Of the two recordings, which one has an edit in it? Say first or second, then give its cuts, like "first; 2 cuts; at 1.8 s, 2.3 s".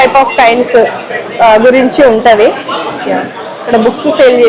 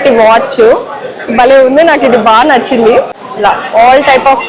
second; 1 cut; at 3.2 s